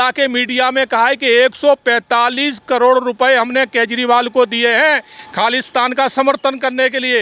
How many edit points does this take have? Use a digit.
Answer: 0